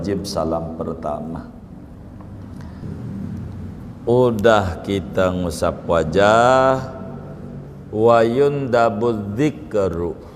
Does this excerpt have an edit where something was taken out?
yes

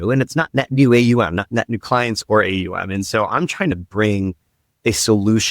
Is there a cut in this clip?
yes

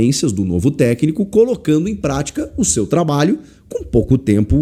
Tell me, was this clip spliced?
no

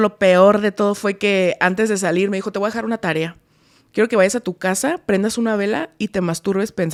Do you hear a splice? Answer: no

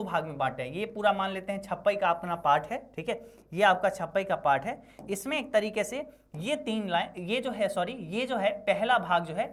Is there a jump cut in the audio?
no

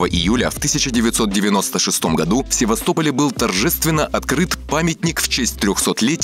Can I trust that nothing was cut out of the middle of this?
yes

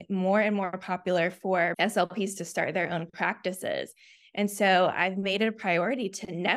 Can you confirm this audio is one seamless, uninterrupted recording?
no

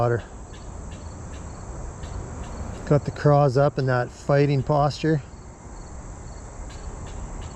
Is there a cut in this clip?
no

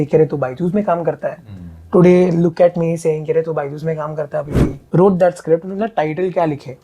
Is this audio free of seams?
no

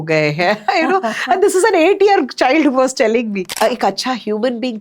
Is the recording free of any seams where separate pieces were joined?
no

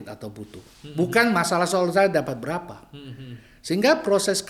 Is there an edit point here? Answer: no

